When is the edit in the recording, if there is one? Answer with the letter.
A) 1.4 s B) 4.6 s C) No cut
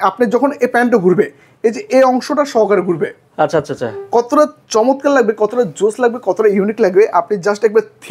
C